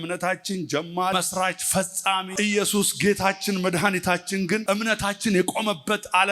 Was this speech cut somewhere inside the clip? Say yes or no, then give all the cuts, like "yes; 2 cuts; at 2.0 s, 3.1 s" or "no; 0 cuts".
yes; 3 cuts; at 1.1 s, 2.3 s, 4.6 s